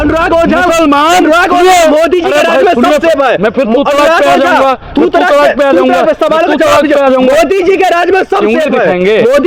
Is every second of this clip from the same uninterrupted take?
yes; 0 cuts

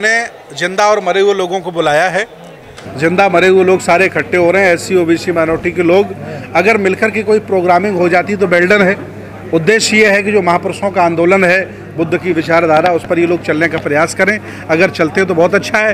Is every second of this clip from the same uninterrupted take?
yes; 0 cuts

